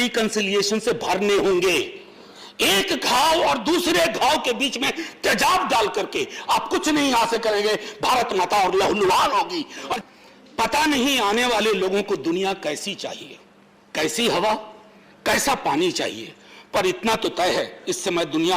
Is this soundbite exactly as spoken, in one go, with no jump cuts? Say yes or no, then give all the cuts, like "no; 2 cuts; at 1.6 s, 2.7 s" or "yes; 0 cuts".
no; 1 cut; at 9.9 s